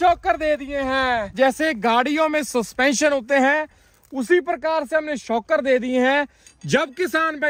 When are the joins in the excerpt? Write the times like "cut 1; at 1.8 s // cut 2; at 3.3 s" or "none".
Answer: none